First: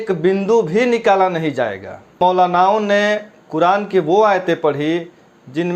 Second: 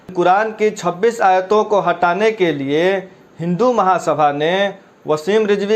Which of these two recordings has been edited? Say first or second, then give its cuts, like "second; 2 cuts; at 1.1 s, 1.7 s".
first; 1 cut; at 2.2 s